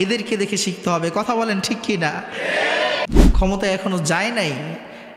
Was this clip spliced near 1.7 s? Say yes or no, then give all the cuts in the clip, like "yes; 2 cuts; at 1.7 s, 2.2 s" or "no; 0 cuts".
no; 1 cut; at 3.1 s